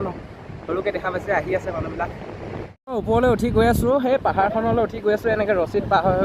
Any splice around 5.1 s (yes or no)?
no